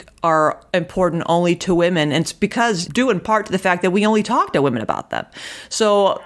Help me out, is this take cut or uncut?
cut